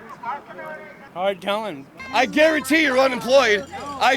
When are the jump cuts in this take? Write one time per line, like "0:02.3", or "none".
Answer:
0:00.9
0:01.9